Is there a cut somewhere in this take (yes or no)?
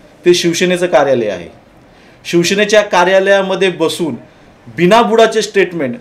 no